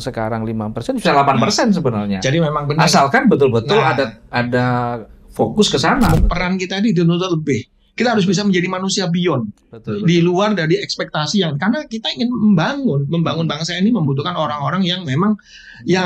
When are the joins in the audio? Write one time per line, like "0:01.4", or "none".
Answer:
0:06.2

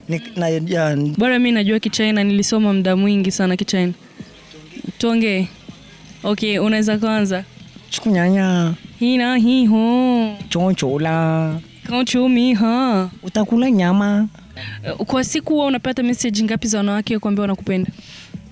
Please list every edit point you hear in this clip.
0:01.1
0:14.4

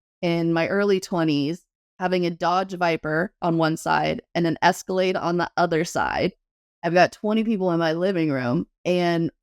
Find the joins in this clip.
0:03.3

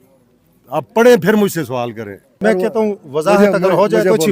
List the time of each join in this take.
0:02.3

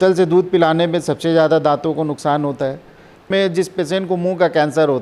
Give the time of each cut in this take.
0:03.3

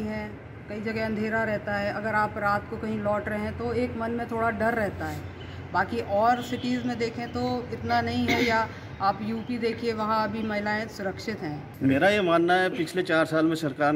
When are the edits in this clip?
0:11.7

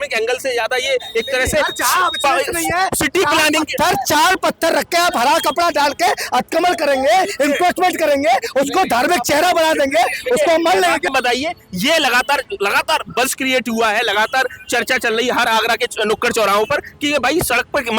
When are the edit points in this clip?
0:11.1

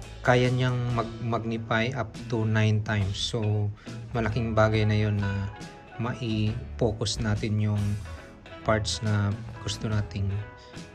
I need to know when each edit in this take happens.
0:09.4

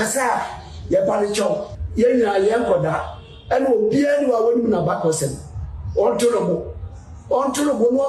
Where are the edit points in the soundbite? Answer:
0:01.8

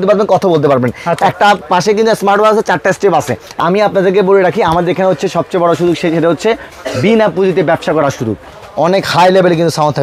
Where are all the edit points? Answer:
0:03.5
0:08.5

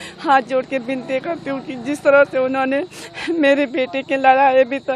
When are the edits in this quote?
none

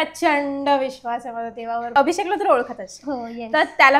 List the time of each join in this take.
0:01.9

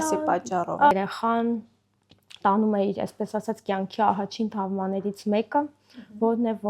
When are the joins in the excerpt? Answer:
0:00.9

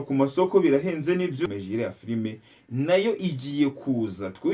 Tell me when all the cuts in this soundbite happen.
0:01.5

